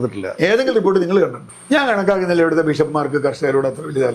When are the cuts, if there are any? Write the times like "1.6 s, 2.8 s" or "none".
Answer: 1.5 s

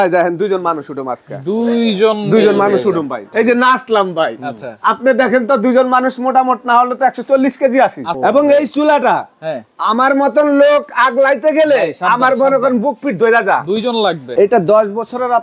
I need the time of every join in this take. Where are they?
3.2 s, 8.1 s, 14.2 s

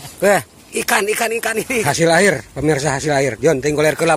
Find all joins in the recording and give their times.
2.0 s

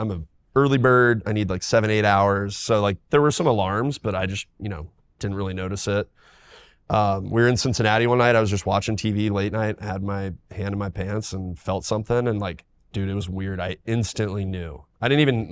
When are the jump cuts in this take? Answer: none

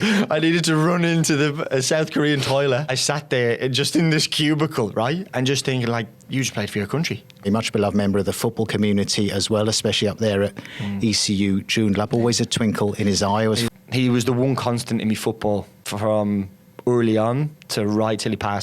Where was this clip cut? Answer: 2.9 s, 7.5 s, 13.6 s, 15.8 s

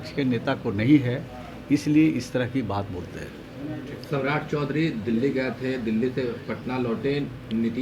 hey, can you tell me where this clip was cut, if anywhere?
none

